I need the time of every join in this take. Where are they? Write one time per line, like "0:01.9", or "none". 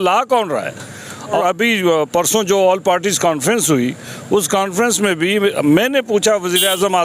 0:01.4

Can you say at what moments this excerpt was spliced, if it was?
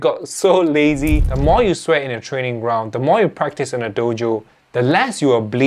0:01.3

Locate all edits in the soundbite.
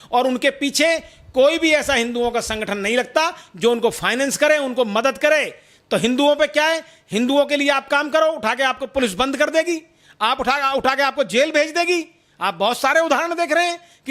none

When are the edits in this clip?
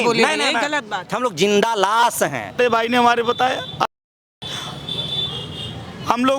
0:01.0
0:02.6

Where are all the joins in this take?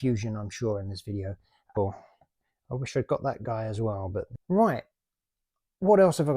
0:01.7
0:04.3

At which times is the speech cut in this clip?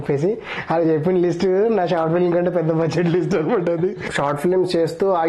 0:04.0

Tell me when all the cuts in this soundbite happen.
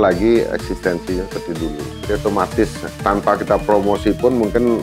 0:01.9

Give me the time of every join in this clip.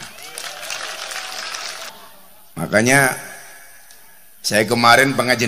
0:01.9

